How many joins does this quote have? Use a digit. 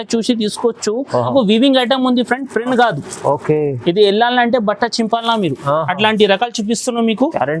1